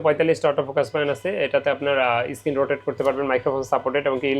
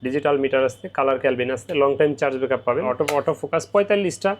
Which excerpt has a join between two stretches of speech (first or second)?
second